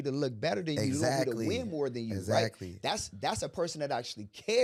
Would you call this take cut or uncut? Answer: uncut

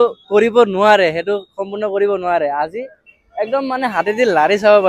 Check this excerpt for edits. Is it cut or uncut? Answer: uncut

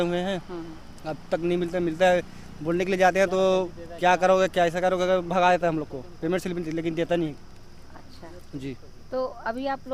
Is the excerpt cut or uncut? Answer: uncut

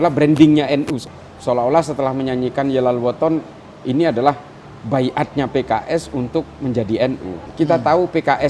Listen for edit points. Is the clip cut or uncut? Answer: cut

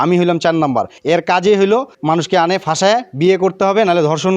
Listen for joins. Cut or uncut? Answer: cut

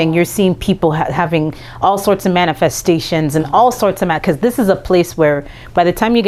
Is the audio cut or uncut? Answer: uncut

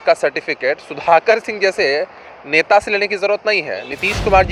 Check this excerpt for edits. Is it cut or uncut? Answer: uncut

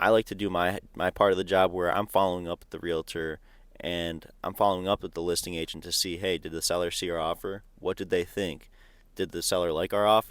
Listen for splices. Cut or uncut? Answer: uncut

